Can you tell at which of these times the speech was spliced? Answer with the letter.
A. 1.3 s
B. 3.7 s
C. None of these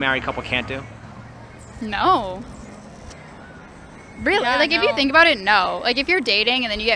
C